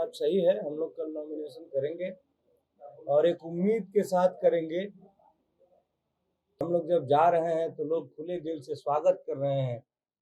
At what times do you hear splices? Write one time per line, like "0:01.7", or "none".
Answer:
0:06.6